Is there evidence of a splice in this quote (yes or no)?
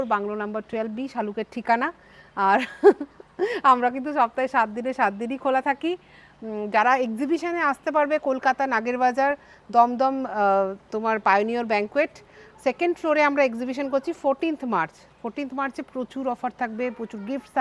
no